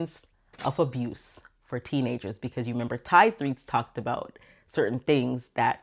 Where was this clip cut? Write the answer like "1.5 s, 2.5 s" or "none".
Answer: none